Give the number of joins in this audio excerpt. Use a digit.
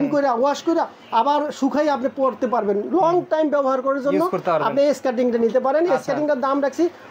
0